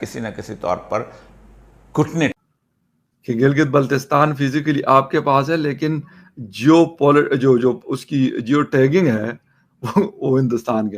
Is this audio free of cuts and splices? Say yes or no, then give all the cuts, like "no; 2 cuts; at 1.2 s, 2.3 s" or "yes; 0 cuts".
yes; 0 cuts